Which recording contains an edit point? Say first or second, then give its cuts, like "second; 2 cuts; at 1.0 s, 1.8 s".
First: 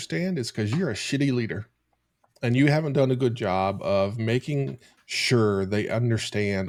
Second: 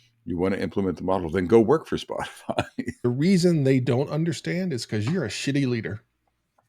second; 1 cut; at 3.1 s